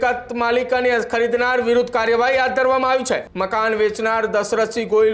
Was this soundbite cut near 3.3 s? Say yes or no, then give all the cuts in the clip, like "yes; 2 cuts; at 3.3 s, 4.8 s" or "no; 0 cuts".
yes; 1 cut; at 3.3 s